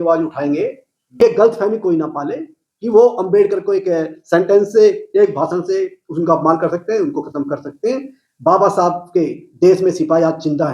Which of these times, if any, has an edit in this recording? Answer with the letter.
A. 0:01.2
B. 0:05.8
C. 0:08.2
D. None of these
A